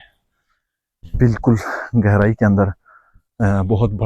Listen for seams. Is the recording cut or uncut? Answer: uncut